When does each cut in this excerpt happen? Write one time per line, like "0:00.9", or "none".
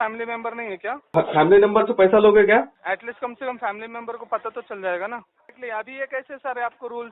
0:01.1
0:02.8
0:05.6